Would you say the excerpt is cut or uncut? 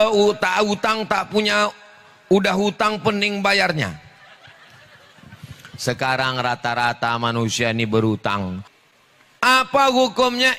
cut